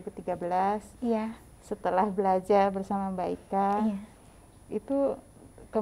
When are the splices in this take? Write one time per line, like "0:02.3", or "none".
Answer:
none